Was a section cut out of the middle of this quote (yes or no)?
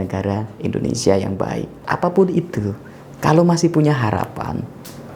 yes